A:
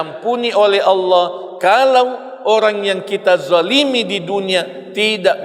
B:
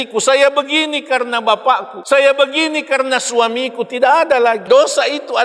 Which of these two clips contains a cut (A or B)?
B